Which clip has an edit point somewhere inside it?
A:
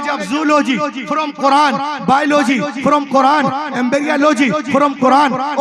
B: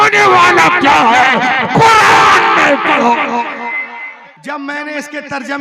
B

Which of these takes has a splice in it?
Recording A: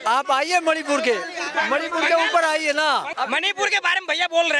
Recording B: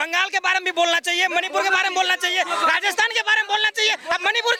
A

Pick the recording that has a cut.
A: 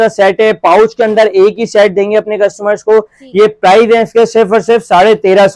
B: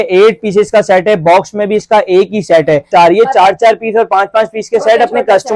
B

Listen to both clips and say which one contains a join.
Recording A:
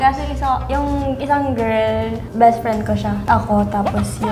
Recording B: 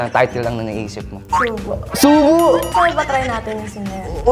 A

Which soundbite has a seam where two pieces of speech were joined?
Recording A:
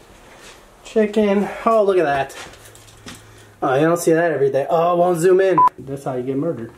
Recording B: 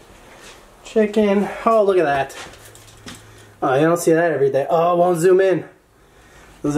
A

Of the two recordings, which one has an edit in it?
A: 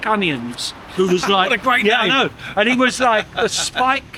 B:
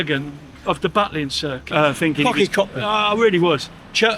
B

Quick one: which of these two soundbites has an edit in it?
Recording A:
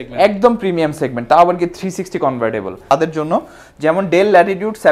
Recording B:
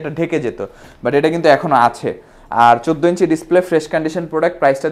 A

